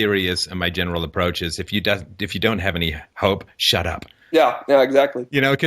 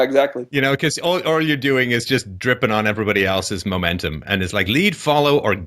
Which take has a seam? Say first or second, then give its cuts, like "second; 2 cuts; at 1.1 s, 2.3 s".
first; 1 cut; at 1.1 s